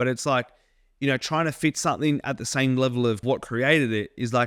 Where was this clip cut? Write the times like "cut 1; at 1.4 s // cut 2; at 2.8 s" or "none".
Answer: cut 1; at 3.2 s